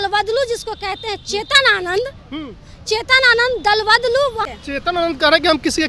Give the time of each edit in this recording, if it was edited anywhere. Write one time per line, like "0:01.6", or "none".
0:04.5